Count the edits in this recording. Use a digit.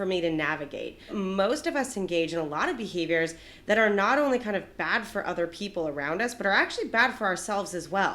1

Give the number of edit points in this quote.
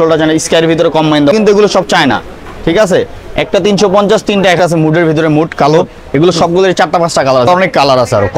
3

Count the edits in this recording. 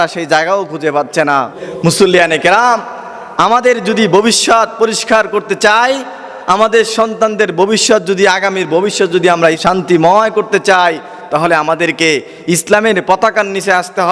2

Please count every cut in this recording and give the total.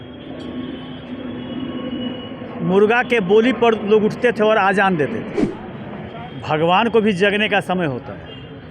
1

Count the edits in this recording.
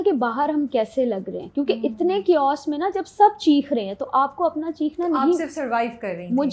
0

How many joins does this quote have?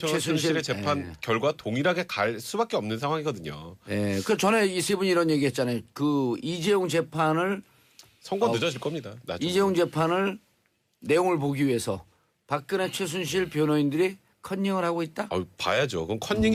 0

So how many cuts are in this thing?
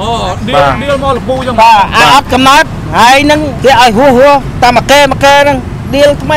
1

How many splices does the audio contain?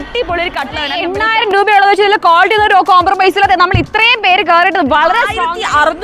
2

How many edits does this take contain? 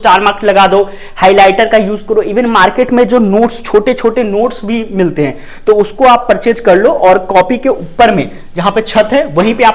0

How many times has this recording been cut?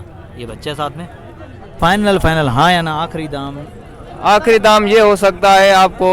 1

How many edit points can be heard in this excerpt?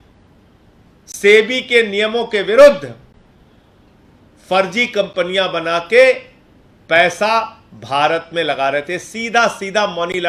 0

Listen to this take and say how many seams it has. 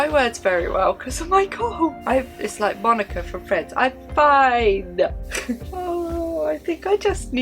2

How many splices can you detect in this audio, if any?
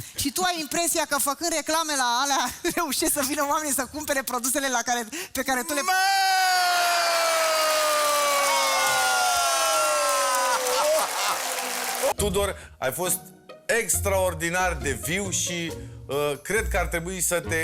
1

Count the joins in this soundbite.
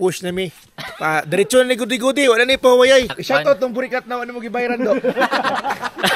1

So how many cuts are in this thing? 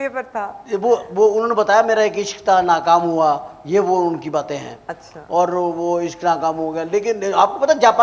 0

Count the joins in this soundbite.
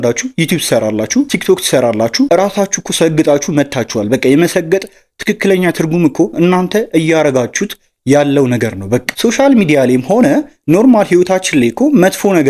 0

